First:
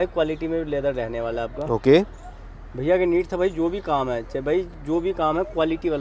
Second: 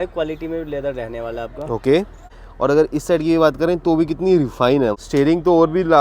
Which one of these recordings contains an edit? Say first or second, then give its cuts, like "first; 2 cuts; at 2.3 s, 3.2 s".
second; 2 cuts; at 2.4 s, 5.0 s